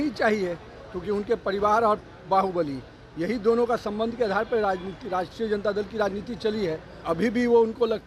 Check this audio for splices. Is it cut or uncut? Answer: cut